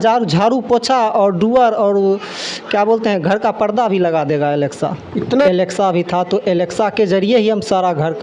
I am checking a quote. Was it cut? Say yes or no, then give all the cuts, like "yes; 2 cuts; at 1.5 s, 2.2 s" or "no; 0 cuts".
yes; 1 cut; at 5.3 s